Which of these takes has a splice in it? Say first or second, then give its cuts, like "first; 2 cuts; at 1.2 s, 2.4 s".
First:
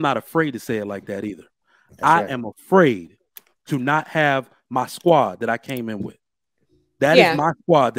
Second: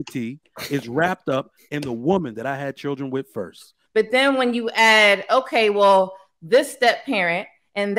second; 1 cut; at 3.7 s